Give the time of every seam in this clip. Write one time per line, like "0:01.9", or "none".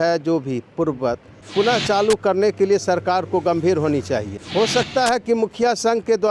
0:01.3
0:04.4